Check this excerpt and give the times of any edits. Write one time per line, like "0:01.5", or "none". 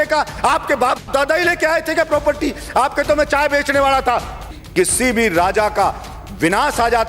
0:04.6